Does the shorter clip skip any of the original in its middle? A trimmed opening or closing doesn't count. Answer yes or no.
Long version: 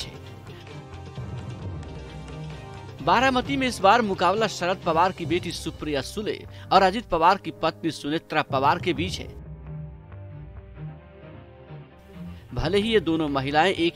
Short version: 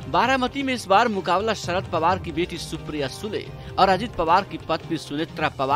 no